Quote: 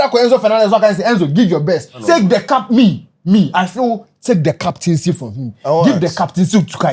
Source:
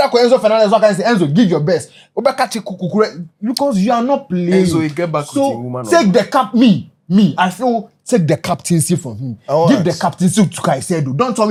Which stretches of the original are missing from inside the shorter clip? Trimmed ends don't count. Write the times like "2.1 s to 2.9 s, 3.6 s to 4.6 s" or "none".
1.9 s to 5.8 s

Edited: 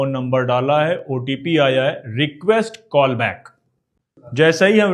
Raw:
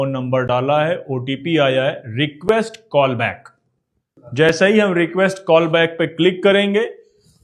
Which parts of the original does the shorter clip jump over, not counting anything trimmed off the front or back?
none

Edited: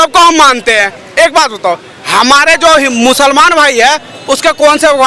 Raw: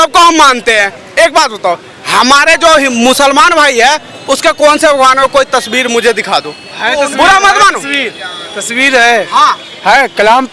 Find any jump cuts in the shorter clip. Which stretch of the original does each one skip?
none

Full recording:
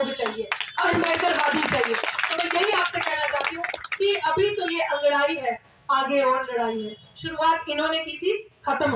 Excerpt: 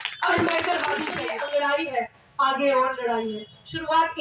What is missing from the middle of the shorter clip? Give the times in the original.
1.7 s to 4.7 s

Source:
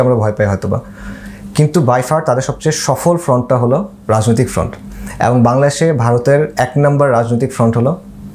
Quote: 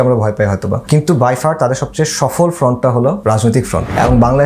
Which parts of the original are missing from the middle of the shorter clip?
0.8 s to 1.5 s, 4.1 s to 4.6 s

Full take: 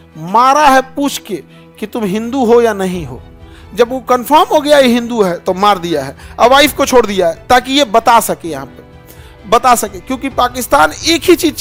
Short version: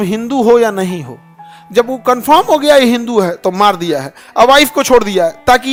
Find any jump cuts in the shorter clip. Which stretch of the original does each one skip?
none

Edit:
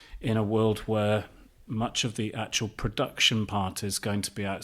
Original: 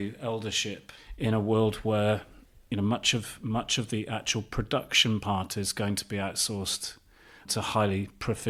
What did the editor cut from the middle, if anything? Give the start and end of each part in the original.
2.6 s to 3.3 s

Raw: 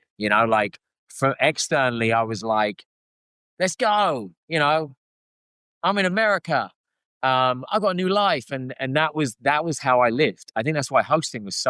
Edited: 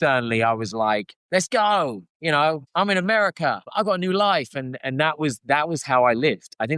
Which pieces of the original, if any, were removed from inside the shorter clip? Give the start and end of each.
2.8 s to 3.4 s, 4.9 s to 5.7 s, 6.7 s to 7.6 s

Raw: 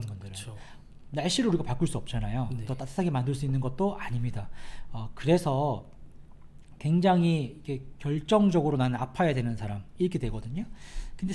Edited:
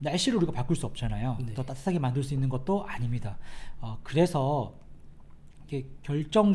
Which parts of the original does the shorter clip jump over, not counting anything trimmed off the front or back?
6.7 s to 7.5 s

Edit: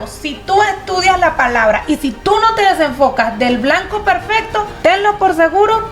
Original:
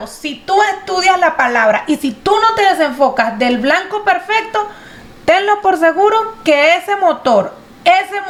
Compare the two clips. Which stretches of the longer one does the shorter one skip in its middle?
4.7 s to 5.2 s

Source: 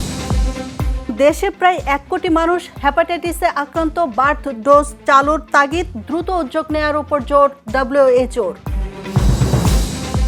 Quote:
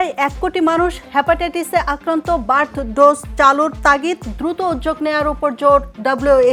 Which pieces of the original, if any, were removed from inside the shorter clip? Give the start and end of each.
none

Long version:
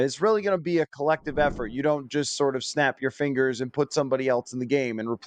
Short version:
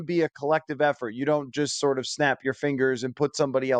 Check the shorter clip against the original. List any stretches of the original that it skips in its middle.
none

